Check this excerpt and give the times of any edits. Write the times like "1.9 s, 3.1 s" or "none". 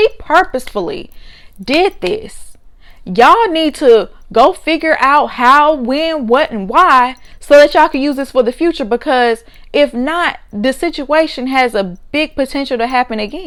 none